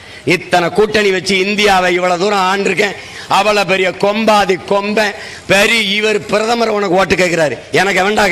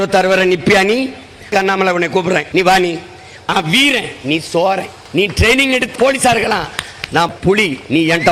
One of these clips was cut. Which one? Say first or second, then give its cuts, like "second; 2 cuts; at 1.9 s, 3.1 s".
second; 6 cuts; at 1.5 s, 2.5 s, 3.5 s, 5.0 s, 5.9 s, 7.3 s